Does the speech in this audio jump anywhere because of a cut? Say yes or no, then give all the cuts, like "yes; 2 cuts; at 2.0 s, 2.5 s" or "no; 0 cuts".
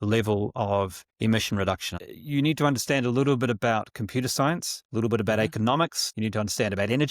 yes; 1 cut; at 1.9 s